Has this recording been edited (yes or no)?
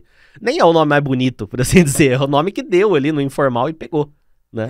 no